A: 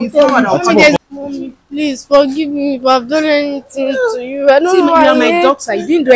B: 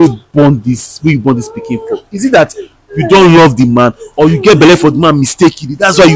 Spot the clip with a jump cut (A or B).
A